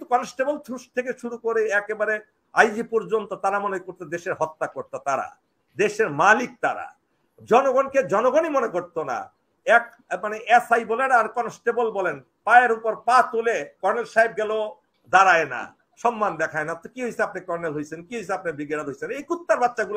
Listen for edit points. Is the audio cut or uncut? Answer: uncut